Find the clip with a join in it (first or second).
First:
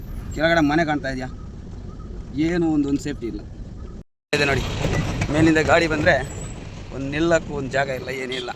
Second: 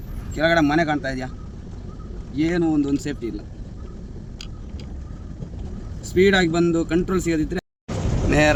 first